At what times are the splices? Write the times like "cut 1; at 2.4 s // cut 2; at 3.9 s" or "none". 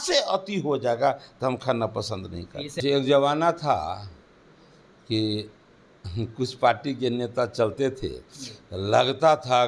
cut 1; at 2.8 s